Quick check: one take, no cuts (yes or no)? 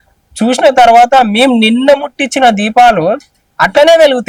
yes